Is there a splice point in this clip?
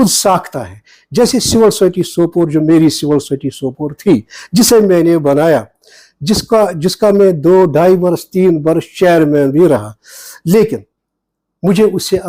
no; 0 cuts

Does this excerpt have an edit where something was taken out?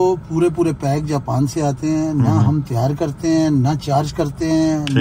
no; 0 cuts

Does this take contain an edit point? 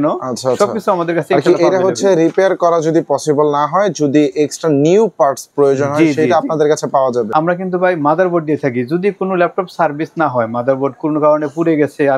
yes; 1 cut; at 7.3 s

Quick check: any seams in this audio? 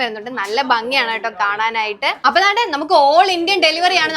yes; 1 cut; at 2.2 s

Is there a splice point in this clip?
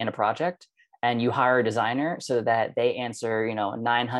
no; 0 cuts

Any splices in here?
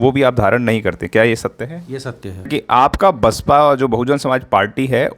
yes; 1 cut; at 2.5 s

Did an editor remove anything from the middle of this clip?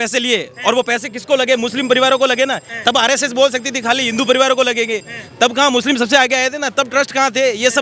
no; 0 cuts

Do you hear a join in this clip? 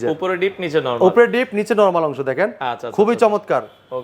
no; 0 cuts

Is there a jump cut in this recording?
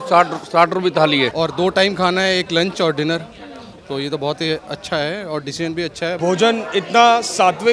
yes; 2 cuts; at 1.3 s, 6.2 s

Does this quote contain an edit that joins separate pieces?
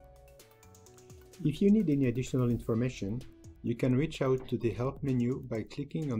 yes; 1 cut; at 1.2 s

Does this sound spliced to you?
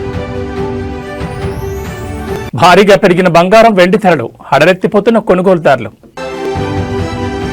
yes; 2 cuts; at 2.4 s, 6.3 s

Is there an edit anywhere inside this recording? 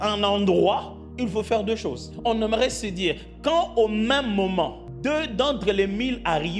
yes; 3 cuts; at 1.0 s, 2.1 s, 4.8 s

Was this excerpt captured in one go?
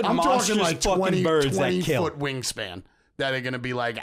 yes; 0 cuts

